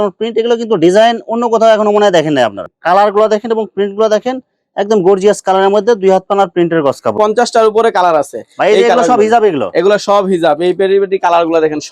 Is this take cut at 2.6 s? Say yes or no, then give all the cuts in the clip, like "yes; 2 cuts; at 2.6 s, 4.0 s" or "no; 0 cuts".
yes; 2 cuts; at 2.6 s, 7.1 s